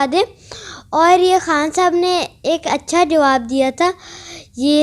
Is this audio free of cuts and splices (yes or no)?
yes